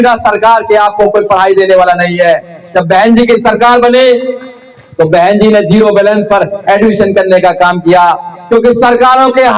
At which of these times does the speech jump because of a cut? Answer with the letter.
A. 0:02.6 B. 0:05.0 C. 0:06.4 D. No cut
D